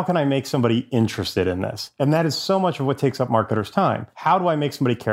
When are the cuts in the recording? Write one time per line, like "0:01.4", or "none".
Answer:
0:01.8
0:04.1